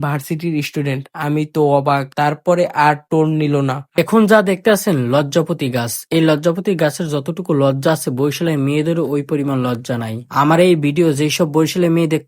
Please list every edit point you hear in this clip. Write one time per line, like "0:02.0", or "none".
0:04.0